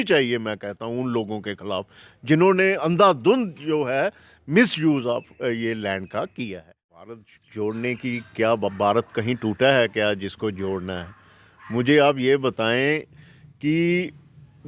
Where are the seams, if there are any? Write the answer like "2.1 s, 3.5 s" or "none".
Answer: 7.1 s